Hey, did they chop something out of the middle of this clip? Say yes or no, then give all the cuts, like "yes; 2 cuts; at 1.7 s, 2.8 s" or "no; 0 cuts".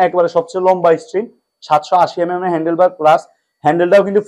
no; 0 cuts